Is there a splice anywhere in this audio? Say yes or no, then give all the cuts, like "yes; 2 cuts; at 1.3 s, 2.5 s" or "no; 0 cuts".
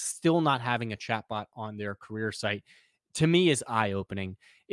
no; 0 cuts